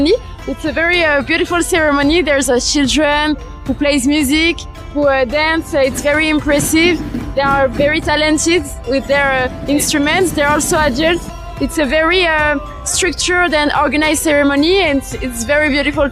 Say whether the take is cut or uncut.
uncut